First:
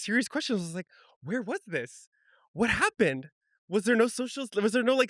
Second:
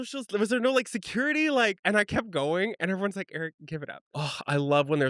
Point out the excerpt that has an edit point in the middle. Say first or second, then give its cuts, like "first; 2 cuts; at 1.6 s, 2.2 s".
second; 2 cuts; at 1.8 s, 4.0 s